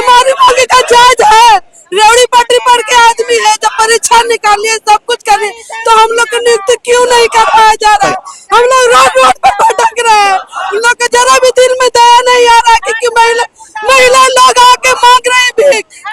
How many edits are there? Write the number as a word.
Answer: zero